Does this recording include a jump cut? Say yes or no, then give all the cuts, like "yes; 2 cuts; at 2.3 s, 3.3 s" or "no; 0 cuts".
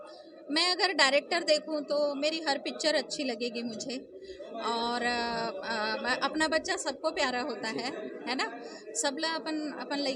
no; 0 cuts